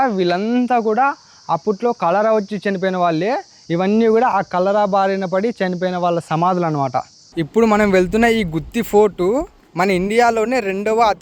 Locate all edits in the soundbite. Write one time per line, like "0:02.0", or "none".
none